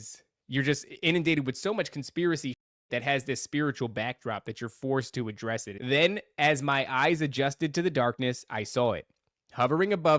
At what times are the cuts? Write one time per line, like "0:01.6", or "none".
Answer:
0:05.7